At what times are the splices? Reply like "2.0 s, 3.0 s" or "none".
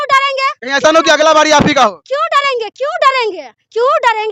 none